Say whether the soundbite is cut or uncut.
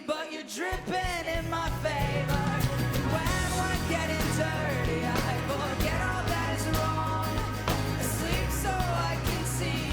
uncut